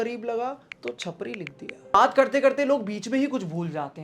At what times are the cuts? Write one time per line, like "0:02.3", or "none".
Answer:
0:01.9